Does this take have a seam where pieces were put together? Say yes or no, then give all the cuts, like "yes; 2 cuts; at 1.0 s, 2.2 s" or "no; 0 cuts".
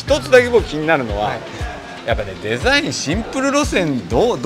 no; 0 cuts